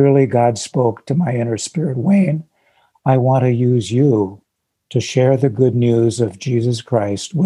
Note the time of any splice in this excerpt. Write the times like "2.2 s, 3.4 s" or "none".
none